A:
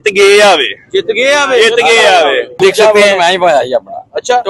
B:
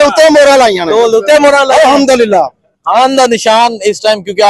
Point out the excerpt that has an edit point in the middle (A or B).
A